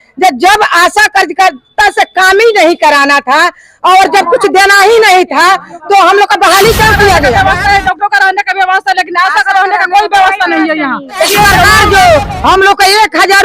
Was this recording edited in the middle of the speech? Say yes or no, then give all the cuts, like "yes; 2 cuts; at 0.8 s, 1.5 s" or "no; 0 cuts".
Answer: yes; 2 cuts; at 7.3 s, 11.8 s